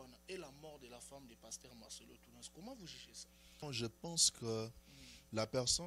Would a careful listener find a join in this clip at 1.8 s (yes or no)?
no